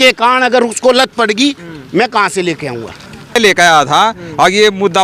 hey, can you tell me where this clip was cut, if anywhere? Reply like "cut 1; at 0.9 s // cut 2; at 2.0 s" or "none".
cut 1; at 3.4 s